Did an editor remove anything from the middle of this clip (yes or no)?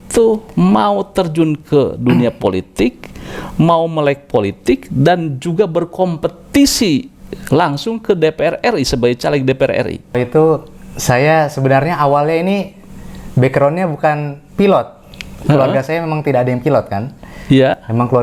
no